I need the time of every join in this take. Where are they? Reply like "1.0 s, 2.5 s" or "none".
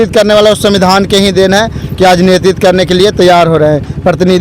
none